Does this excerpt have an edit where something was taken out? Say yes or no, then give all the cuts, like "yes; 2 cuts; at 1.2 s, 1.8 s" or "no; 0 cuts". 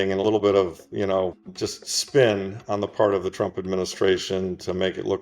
yes; 1 cut; at 1.4 s